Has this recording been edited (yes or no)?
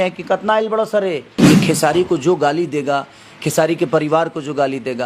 yes